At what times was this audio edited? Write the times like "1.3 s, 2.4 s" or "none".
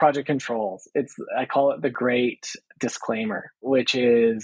1.9 s, 3.6 s